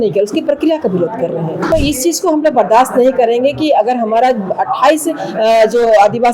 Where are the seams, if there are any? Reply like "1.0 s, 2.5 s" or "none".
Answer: 1.7 s